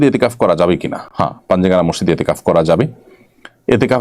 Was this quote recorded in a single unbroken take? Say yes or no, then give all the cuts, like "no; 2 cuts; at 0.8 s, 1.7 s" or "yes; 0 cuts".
yes; 0 cuts